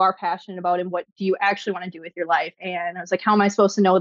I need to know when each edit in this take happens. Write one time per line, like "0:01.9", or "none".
0:02.6